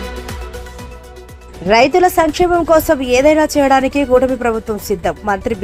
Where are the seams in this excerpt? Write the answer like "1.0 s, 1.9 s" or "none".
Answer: 1.4 s

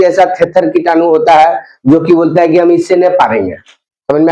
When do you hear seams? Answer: none

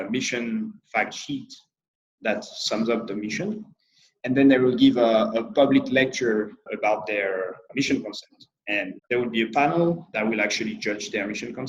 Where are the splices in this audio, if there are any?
6.7 s, 7.7 s, 9.0 s, 10.1 s

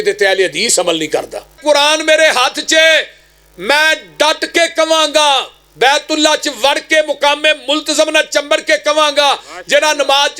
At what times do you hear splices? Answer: 1.6 s

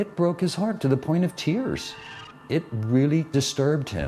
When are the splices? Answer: 2.2 s, 3.3 s

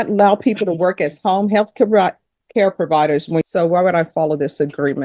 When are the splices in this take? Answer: 3.4 s

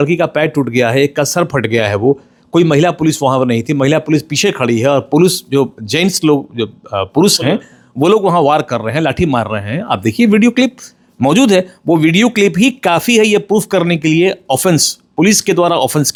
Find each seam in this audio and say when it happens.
none

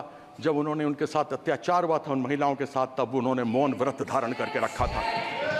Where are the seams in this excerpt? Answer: none

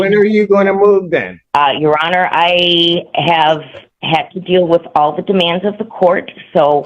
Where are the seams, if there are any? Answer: 1.4 s

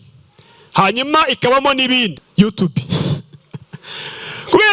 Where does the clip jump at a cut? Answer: 2.1 s

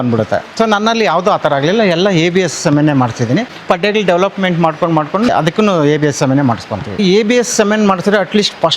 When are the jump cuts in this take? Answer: 3.5 s, 5.3 s, 7.0 s

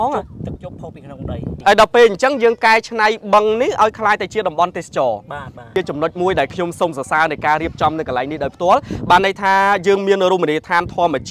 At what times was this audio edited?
1.6 s, 5.7 s

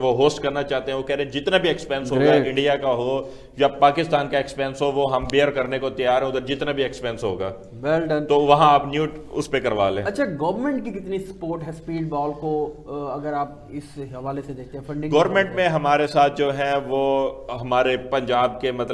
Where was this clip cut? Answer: none

